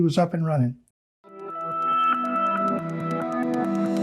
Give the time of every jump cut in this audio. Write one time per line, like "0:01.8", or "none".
0:01.0

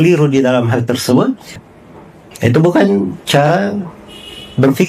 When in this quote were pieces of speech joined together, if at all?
0:01.5

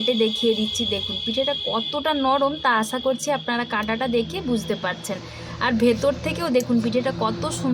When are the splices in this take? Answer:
none

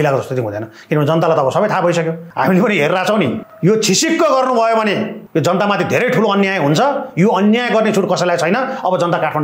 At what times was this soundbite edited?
0:02.2
0:03.5
0:05.2

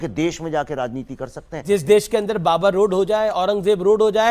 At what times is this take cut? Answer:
0:01.6

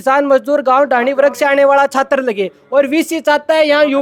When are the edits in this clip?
none

